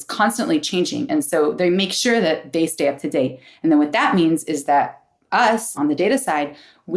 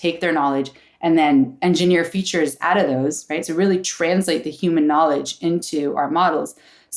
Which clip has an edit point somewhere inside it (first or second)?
first